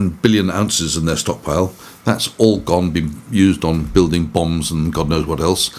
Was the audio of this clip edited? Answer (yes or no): no